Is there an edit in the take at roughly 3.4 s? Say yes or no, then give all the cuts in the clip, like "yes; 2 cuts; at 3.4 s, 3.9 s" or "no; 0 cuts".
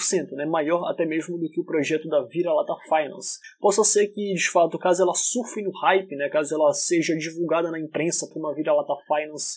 yes; 1 cut; at 3.4 s